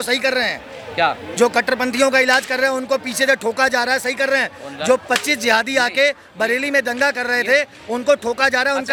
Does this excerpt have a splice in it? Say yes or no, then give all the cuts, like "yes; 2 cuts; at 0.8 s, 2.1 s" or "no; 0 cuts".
no; 0 cuts